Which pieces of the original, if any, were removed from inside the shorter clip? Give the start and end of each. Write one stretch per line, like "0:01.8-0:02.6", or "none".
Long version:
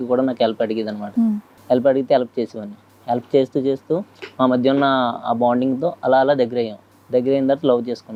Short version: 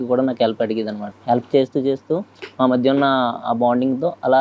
0:01.0-0:02.8